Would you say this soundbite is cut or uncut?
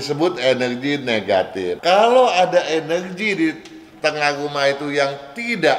cut